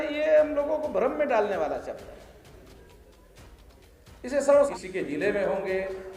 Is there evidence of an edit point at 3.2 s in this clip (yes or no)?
no